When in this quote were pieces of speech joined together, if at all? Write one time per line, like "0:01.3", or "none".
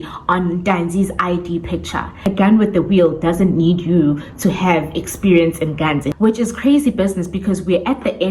0:02.2
0:06.1